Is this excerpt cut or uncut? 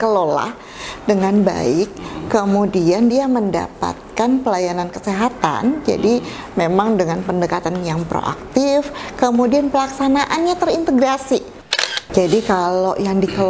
cut